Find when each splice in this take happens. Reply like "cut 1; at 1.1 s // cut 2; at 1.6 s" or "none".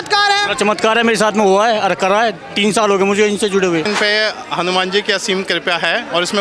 cut 1; at 3.9 s